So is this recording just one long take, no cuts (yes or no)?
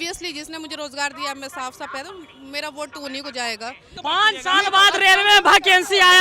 no